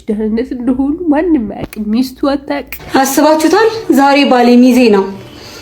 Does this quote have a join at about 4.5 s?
no; 1 cut; at 2.7 s

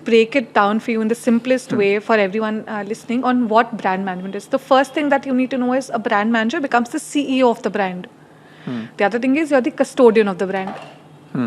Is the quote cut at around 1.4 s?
no; 0 cuts

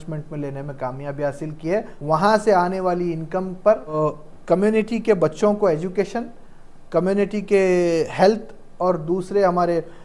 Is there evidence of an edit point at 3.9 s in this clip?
yes; 2 cuts; at 1.9 s, 3.9 s

